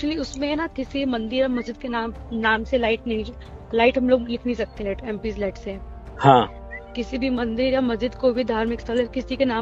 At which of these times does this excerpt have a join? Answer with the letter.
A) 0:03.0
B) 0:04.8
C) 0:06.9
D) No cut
D